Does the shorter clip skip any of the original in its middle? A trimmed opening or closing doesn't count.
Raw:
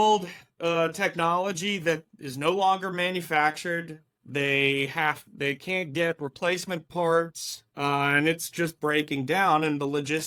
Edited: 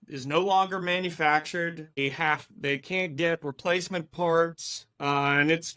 yes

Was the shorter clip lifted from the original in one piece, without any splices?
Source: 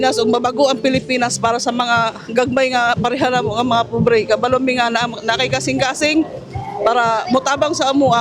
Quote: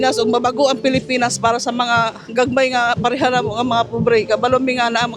yes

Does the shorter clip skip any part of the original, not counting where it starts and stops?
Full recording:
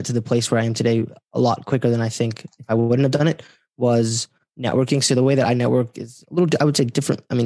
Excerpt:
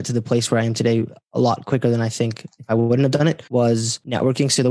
yes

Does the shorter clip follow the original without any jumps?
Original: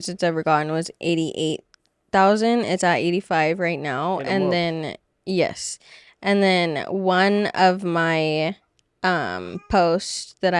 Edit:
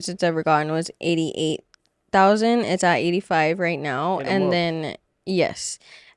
yes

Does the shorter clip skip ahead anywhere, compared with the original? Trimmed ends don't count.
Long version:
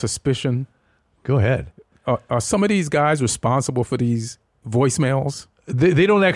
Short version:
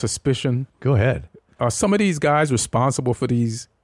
yes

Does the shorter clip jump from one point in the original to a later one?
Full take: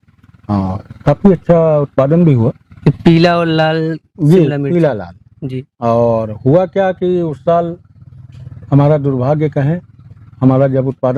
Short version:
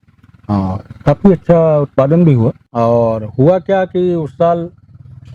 yes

